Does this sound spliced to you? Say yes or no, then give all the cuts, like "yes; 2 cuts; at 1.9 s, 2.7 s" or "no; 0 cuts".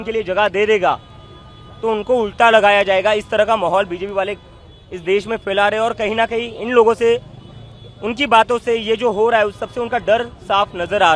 no; 0 cuts